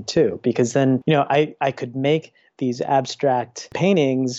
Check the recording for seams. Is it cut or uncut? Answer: cut